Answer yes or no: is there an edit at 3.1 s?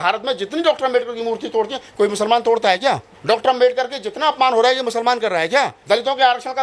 yes